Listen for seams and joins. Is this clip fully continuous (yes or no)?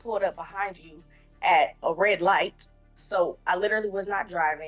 yes